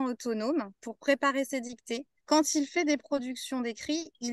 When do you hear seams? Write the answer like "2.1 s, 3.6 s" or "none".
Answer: 2.1 s